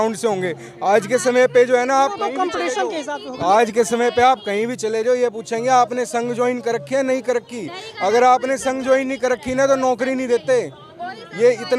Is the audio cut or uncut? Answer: uncut